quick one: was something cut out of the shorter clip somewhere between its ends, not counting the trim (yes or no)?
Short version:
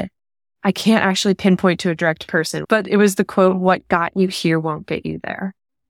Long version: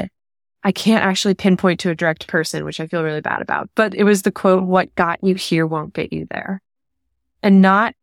yes